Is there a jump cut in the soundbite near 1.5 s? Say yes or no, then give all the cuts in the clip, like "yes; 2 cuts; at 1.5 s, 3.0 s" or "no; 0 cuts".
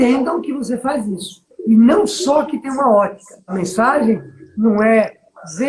yes; 2 cuts; at 1.5 s, 3.5 s